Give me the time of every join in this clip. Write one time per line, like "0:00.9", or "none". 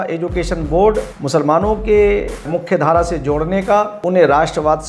0:01.1
0:02.6
0:03.9